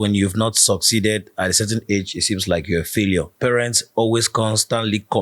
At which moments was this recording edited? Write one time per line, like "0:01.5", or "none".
0:03.3